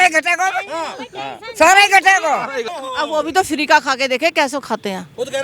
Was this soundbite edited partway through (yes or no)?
no